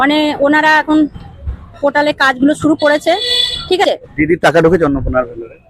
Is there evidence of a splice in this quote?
yes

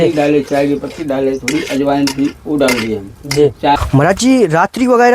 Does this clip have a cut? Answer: yes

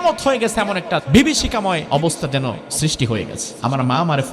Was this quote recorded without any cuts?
no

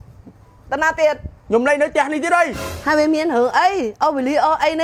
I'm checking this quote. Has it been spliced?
no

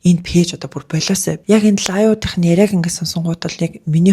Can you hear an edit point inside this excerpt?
yes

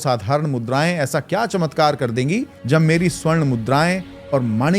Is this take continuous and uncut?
no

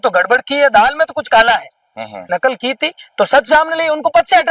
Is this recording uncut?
no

